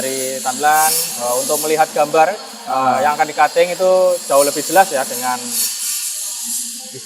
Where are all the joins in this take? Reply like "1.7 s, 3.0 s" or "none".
none

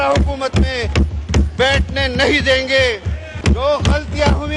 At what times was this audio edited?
3.3 s

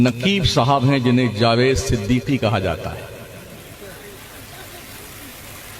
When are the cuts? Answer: none

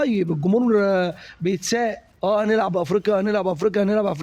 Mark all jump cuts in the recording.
2.1 s

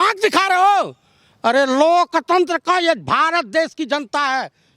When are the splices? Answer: none

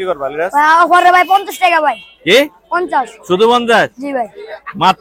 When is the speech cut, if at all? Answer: none

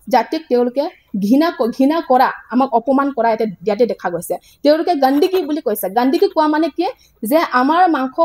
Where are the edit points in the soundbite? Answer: none

